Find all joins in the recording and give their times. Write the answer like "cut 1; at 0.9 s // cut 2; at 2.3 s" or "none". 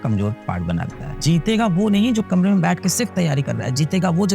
cut 1; at 1.0 s